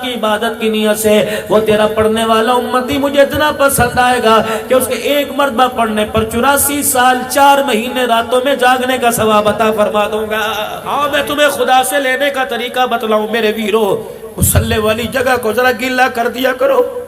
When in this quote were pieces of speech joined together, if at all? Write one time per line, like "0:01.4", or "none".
0:10.8